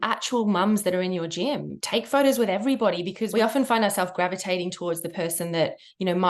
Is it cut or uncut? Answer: cut